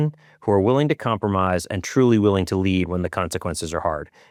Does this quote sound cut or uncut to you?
uncut